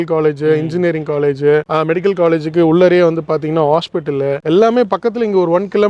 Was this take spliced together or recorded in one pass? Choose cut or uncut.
uncut